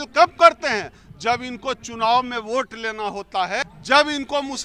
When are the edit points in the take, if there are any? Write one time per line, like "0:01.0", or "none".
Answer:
0:03.6